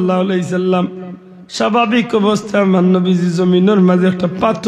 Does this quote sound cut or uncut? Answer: uncut